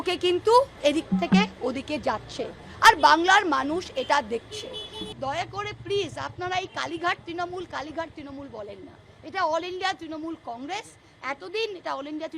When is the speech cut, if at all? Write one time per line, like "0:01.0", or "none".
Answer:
0:05.0